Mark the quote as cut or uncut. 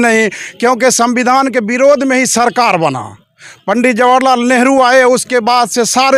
uncut